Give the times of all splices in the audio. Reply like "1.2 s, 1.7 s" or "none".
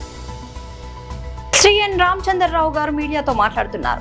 none